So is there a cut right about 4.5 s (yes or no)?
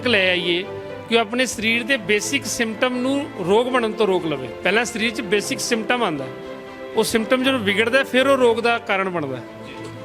yes